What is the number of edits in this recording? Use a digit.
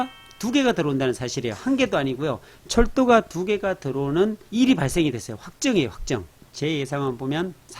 1